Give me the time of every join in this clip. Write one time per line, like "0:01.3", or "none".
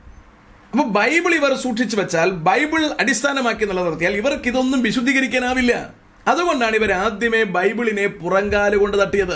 none